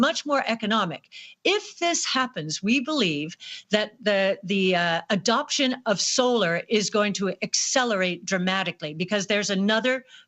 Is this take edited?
no; 0 cuts

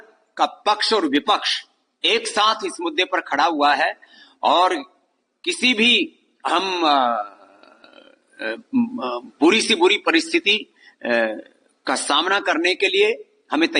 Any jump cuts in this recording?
no; 0 cuts

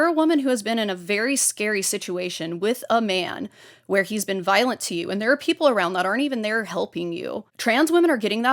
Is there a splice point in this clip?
no; 0 cuts

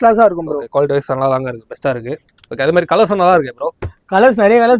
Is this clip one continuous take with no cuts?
yes; 0 cuts

